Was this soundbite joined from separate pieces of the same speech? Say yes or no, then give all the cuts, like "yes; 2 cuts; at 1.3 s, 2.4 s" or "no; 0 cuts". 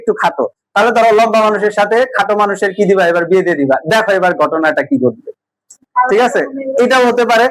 no; 0 cuts